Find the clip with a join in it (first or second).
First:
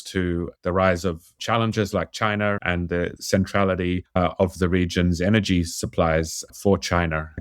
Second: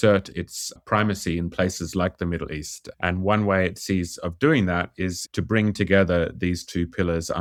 first